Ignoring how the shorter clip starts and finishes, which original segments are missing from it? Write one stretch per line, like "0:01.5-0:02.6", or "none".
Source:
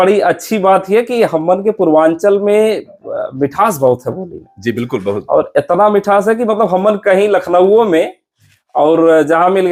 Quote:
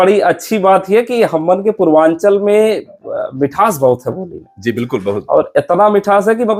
none

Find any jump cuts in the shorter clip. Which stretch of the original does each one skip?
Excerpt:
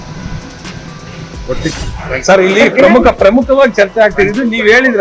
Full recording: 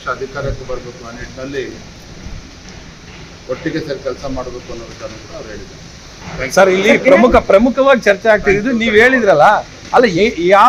0:03.7-0:06.0

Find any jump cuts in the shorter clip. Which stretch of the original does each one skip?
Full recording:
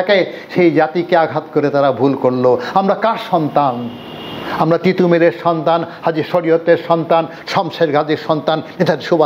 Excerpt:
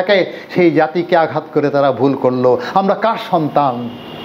none

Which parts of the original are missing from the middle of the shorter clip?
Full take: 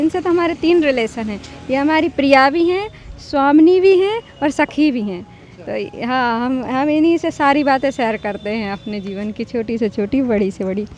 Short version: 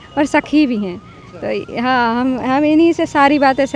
none

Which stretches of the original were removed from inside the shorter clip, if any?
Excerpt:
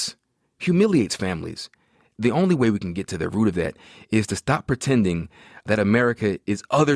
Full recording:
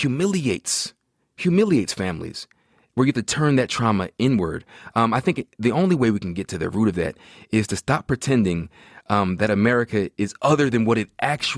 0:02.8-0:05.5
0:09.0-0:09.3

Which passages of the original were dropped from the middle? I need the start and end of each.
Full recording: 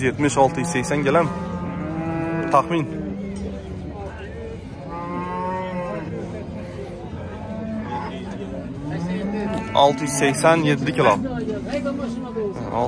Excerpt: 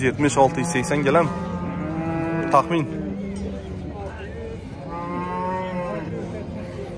none

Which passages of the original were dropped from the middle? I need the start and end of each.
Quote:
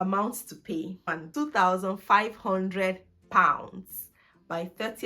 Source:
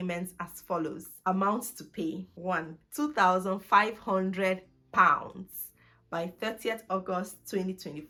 0:02.3-0:02.7

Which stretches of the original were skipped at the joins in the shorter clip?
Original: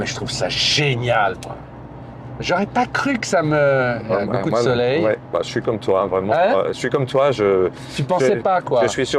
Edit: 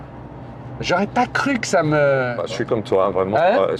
0:04.0-0:05.3

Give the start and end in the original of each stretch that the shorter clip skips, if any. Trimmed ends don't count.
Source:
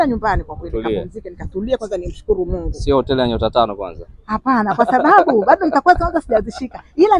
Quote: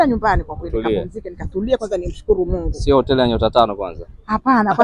none

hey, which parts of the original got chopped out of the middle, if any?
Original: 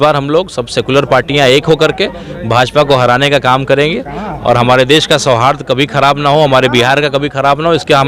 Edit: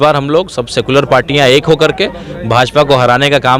none

